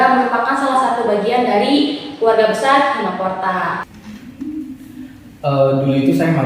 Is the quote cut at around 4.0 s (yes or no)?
yes